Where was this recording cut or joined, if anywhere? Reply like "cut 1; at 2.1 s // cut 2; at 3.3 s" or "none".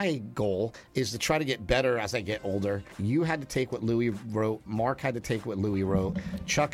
cut 1; at 2.9 s